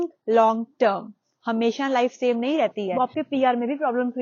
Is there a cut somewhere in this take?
yes; 1 cut; at 2.9 s

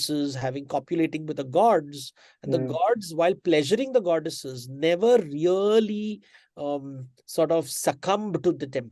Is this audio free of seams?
yes; 0 cuts

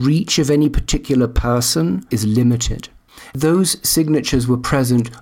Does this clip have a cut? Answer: yes; 2 cuts; at 2.0 s, 3.3 s

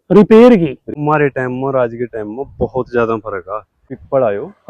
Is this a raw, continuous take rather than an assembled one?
no; 2 cuts; at 0.9 s, 3.9 s

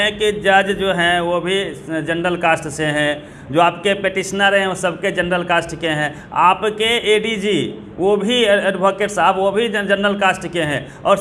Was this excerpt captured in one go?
yes; 0 cuts

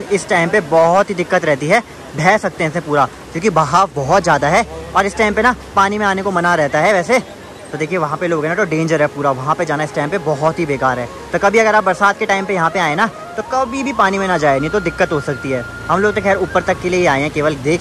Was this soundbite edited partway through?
no; 0 cuts

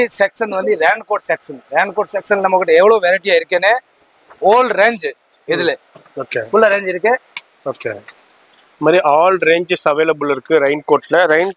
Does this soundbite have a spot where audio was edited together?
no; 0 cuts

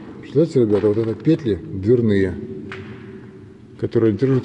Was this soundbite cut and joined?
no; 0 cuts

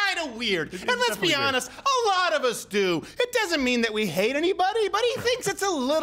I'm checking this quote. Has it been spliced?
no; 0 cuts

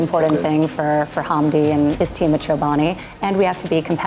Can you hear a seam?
yes; 1 cut; at 2.0 s

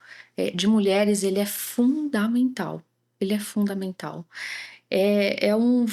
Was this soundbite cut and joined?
no; 0 cuts

